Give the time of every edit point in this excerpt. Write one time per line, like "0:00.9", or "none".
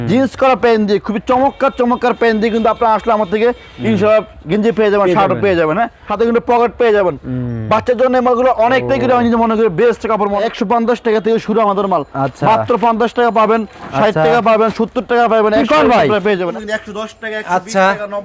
0:06.0
0:10.4
0:16.5